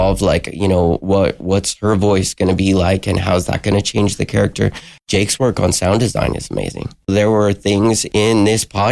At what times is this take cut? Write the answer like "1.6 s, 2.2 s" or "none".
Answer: 5.0 s, 7.1 s